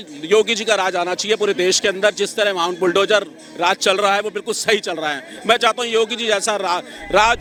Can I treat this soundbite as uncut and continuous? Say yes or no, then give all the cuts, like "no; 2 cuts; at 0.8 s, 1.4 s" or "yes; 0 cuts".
yes; 0 cuts